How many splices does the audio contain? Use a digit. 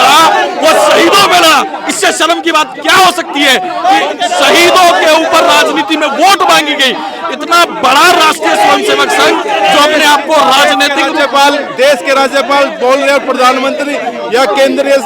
0